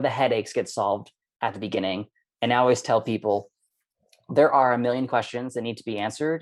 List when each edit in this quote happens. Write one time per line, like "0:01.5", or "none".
none